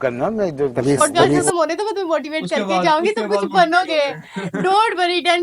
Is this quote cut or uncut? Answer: cut